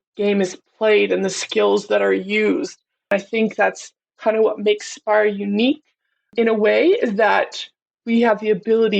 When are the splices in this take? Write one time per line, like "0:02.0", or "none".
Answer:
0:03.1
0:06.3